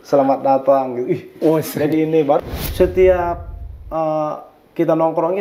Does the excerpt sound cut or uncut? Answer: cut